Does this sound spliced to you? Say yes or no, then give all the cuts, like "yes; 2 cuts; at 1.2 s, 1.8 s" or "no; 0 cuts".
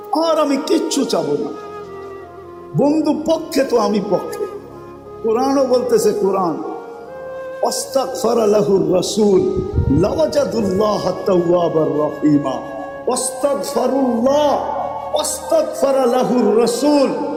no; 0 cuts